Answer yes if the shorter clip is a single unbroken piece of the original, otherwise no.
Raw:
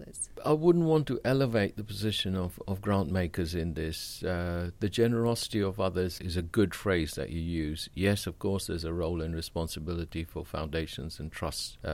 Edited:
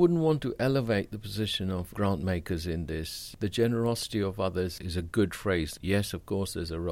no